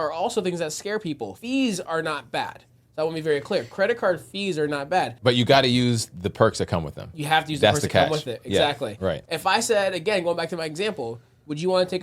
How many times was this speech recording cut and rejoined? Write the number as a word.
three